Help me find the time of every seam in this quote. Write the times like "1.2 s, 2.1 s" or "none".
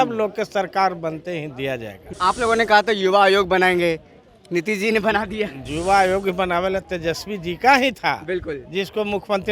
2.0 s